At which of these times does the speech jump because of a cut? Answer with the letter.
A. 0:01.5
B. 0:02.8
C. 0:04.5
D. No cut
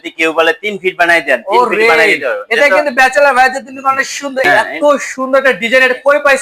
C